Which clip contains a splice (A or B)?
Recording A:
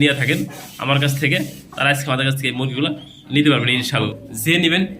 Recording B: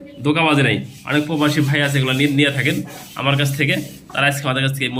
A